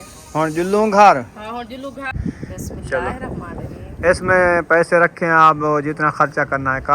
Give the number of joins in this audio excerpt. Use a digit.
1